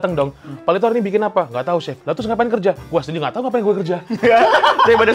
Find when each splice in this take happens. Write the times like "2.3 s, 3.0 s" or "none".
none